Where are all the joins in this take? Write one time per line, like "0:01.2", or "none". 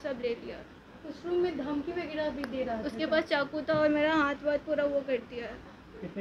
none